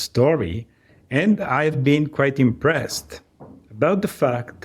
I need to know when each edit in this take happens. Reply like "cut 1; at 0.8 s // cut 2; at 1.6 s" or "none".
none